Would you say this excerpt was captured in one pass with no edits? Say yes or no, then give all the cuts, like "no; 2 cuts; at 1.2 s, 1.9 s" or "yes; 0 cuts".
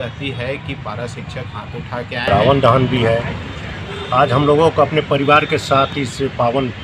no; 1 cut; at 2.3 s